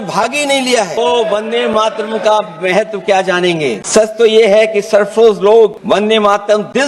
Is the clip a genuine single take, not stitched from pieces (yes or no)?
no